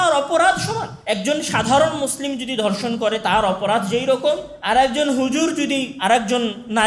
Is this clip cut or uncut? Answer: cut